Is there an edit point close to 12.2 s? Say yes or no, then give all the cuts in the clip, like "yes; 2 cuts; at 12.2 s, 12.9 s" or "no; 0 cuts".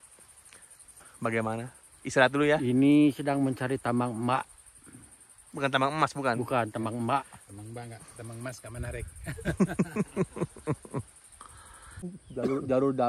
yes; 1 cut; at 12.2 s